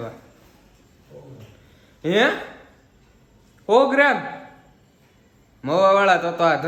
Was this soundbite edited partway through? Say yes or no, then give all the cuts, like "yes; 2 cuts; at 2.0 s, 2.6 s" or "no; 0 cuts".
no; 0 cuts